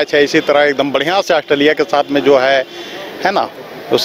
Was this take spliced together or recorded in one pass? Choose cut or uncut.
uncut